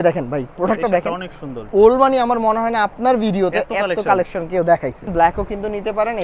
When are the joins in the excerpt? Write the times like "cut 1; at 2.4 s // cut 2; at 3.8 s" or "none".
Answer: cut 1; at 1.5 s // cut 2; at 5.1 s